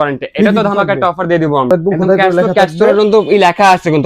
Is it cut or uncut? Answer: cut